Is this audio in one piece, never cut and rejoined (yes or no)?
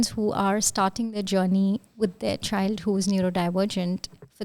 yes